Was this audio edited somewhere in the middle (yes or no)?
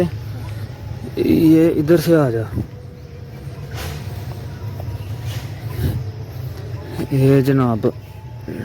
no